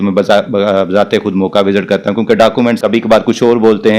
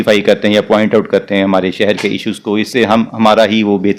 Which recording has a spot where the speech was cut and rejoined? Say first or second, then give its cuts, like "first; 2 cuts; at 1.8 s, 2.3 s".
first; 1 cut; at 2.8 s